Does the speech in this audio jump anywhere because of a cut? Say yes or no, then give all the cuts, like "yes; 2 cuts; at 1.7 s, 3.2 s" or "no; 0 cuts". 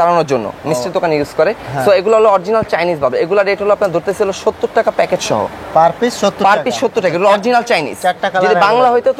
no; 0 cuts